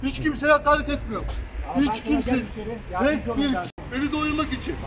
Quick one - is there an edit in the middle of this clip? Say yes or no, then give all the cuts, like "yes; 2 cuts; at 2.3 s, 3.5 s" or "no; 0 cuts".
yes; 1 cut; at 3.8 s